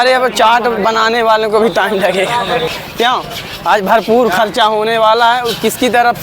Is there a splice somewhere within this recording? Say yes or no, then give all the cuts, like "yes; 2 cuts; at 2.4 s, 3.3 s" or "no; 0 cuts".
yes; 1 cut; at 2.7 s